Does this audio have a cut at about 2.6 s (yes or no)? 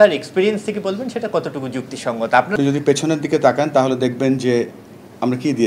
yes